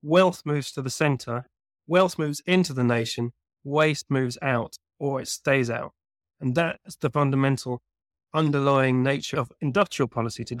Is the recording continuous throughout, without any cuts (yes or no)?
no